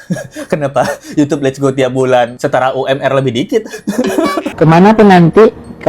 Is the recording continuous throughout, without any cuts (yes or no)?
no